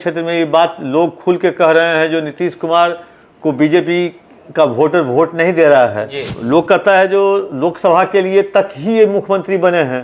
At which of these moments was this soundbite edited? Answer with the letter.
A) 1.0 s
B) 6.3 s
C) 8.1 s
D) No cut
B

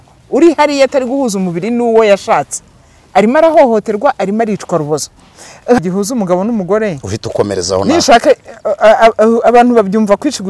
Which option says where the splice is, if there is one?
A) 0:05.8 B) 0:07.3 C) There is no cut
A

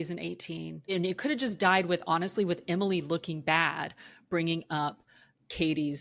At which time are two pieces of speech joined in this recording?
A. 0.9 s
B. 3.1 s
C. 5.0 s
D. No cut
A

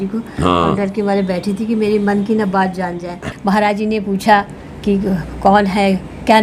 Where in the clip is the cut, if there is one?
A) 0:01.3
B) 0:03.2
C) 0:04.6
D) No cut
B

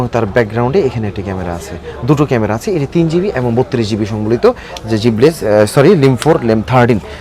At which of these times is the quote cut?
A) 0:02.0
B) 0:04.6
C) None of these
C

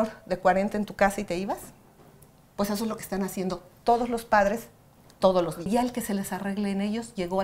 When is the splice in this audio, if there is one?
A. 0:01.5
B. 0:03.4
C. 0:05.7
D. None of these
C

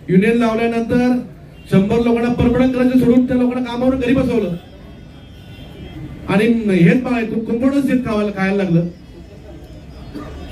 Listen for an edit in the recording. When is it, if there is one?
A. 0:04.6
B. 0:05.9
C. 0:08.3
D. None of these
D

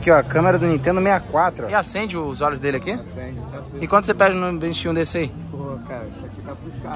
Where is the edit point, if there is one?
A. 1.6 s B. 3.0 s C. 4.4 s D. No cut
A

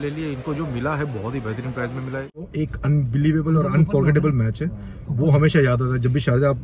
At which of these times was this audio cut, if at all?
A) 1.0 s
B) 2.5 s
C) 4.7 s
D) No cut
B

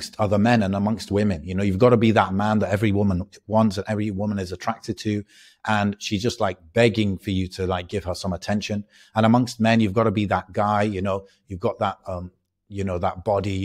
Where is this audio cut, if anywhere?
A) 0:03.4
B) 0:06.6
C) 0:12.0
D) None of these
D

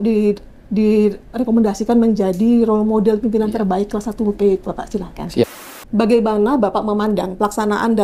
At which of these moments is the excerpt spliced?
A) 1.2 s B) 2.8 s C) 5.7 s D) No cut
C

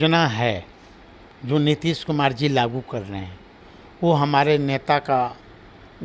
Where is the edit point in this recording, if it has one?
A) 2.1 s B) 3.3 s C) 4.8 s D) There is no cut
D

